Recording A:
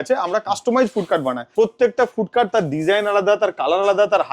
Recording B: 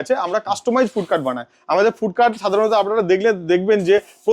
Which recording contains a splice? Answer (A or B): A